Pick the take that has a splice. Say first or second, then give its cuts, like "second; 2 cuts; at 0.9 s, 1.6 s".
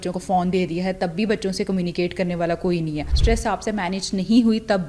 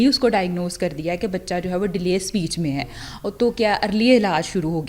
first; 1 cut; at 3.1 s